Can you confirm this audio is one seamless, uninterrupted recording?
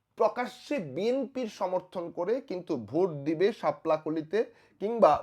yes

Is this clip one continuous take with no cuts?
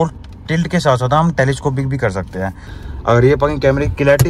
no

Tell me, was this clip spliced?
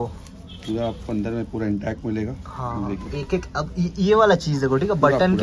no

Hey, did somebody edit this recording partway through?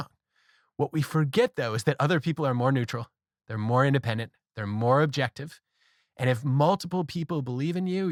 no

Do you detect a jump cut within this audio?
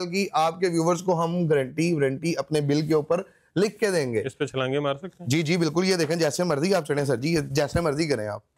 no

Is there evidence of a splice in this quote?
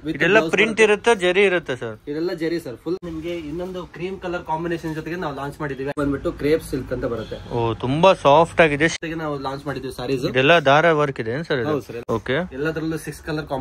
yes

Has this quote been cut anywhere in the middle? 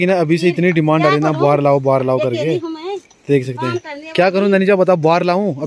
no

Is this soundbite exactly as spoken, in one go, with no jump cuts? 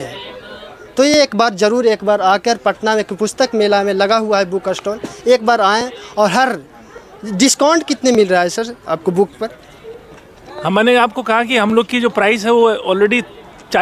yes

